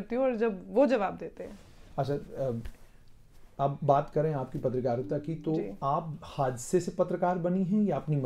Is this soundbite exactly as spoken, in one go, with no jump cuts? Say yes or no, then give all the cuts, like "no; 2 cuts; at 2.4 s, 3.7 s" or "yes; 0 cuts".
yes; 0 cuts